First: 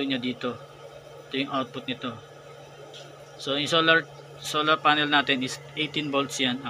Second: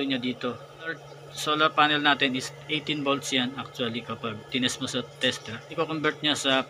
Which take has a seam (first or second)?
second